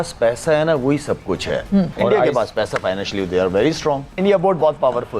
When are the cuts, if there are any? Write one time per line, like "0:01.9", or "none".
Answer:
0:01.9
0:04.1